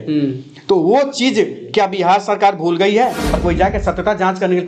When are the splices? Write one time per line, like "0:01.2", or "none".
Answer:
0:03.3